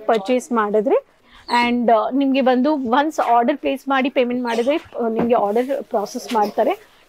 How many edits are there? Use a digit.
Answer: 1